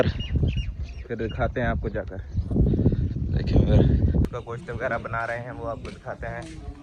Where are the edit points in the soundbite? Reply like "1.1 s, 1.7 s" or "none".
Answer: 4.2 s